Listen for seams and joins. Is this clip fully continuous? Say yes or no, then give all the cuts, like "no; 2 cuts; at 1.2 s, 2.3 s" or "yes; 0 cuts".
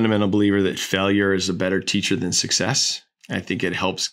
no; 1 cut; at 3.1 s